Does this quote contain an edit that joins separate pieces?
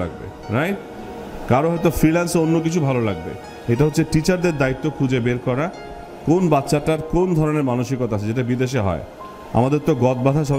no; 0 cuts

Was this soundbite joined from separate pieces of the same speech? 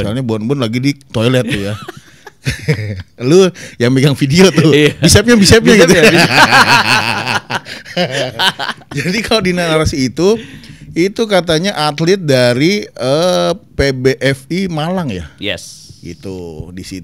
no; 0 cuts

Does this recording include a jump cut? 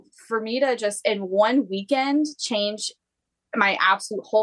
no; 0 cuts

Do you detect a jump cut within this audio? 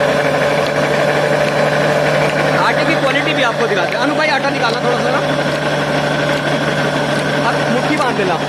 no; 0 cuts

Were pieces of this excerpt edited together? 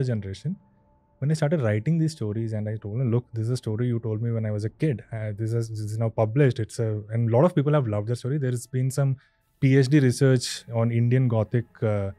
no; 0 cuts

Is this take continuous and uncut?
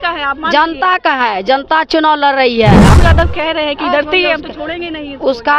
no; 1 cut; at 2.9 s

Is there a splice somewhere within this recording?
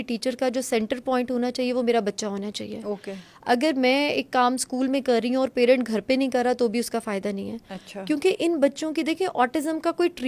no; 0 cuts

